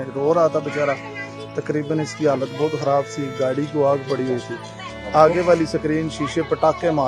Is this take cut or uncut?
uncut